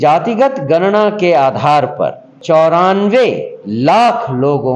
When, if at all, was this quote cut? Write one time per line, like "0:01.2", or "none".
0:02.3